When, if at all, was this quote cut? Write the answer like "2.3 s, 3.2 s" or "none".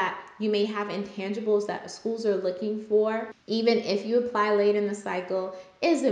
3.3 s